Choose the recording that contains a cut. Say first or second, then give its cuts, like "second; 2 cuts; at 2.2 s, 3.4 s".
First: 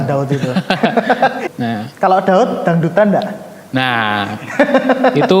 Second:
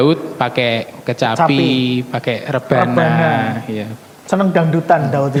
first; 1 cut; at 1.5 s